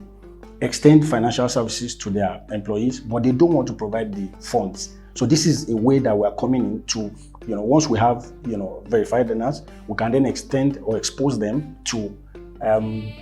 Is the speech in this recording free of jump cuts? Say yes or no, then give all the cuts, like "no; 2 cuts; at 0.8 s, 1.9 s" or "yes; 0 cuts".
yes; 0 cuts